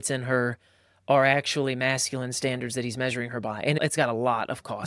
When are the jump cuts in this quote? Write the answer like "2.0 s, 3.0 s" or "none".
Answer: 3.8 s